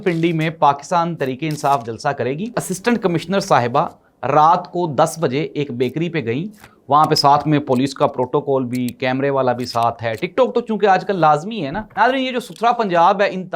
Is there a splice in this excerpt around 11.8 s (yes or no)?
yes